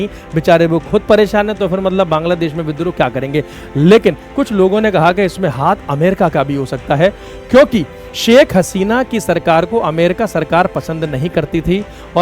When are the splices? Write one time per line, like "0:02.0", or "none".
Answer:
none

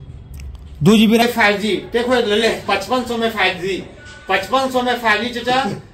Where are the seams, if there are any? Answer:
0:01.2

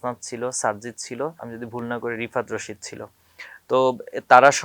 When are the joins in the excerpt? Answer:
0:01.5

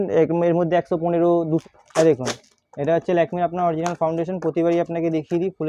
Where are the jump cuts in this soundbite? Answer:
0:01.6

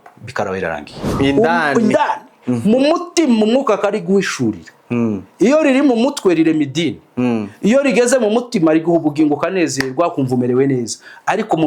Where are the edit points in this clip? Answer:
0:01.1

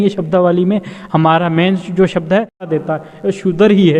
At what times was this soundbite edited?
0:02.7

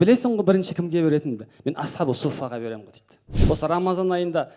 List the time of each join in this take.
0:03.3

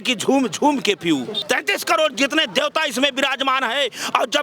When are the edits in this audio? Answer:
0:01.4

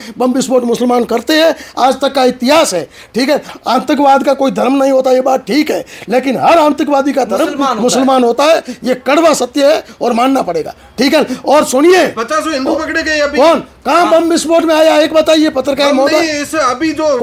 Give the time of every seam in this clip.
none

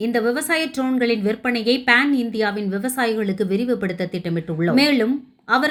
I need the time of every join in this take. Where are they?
none

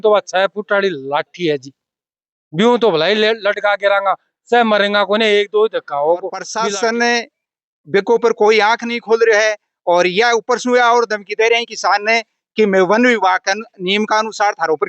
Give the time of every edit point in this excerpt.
0:06.4

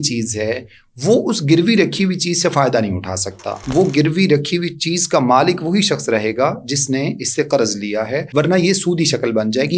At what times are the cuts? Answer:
0:03.5
0:08.3

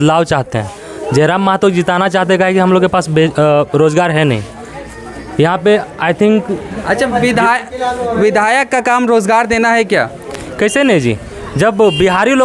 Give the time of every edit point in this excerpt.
none

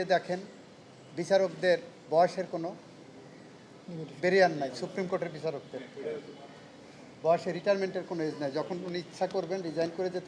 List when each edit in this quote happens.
none

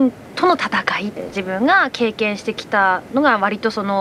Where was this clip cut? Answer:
0:01.1

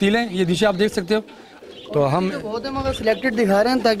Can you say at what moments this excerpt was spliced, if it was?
0:01.5

